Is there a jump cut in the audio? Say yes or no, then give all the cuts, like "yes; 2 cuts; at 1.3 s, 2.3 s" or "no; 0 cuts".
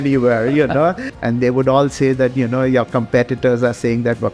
yes; 1 cut; at 1.1 s